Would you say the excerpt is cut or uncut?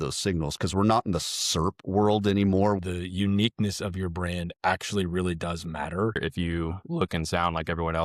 cut